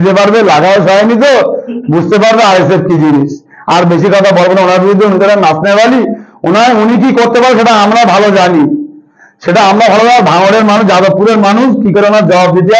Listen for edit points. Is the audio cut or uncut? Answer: uncut